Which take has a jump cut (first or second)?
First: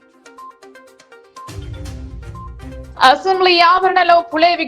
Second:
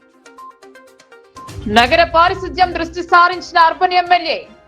first